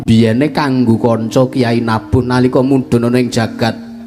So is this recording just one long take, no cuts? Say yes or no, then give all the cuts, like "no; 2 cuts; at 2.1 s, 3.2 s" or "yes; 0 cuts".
yes; 0 cuts